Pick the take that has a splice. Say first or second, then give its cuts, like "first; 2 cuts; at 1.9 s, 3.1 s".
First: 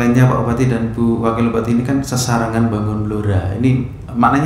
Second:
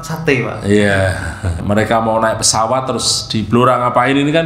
second; 1 cut; at 1.6 s